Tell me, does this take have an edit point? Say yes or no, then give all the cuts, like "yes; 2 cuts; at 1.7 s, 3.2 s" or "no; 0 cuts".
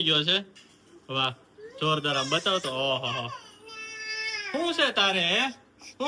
no; 0 cuts